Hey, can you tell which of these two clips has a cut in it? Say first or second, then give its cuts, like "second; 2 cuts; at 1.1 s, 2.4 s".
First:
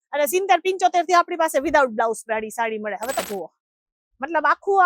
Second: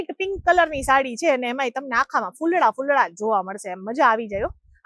first; 1 cut; at 3.2 s